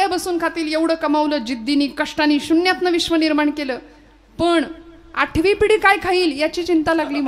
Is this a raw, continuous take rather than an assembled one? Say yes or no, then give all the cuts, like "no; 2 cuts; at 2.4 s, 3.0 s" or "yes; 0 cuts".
yes; 0 cuts